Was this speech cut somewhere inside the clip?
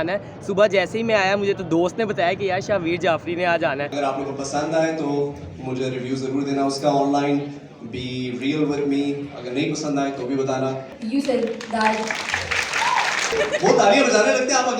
yes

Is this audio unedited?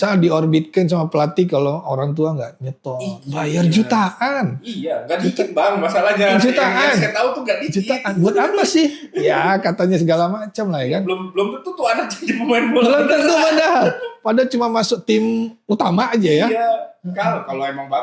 yes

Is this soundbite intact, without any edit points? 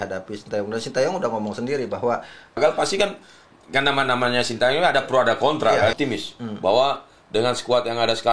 no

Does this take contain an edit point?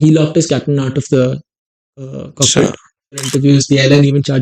yes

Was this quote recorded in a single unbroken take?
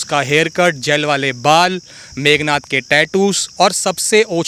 yes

